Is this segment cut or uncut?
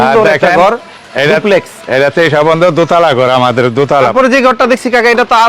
cut